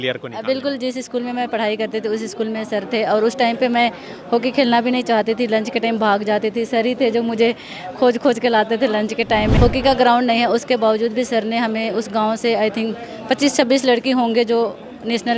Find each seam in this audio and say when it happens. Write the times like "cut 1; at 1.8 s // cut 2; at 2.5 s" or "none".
cut 1; at 9.5 s

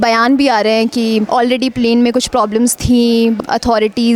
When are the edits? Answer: cut 1; at 1.3 s // cut 2; at 3.4 s

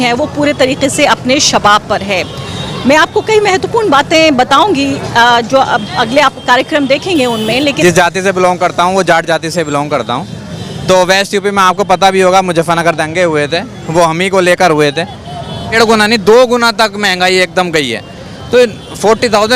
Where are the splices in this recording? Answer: cut 1; at 7.8 s // cut 2; at 15.8 s

